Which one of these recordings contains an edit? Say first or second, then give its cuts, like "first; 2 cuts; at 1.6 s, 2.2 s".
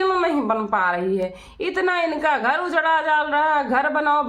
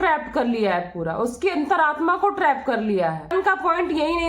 second; 1 cut; at 3.3 s